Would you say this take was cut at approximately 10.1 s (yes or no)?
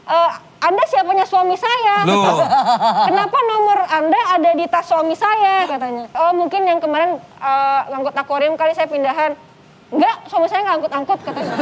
no